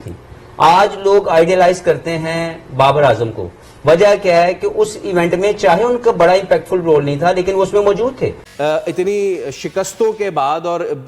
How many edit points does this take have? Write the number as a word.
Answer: one